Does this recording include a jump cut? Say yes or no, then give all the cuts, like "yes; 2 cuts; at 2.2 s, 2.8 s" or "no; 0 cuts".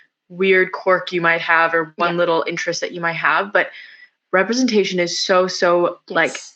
no; 0 cuts